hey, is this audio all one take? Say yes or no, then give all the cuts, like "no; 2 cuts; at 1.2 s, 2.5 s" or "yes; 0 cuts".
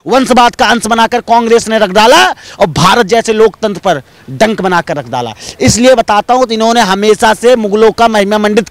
yes; 0 cuts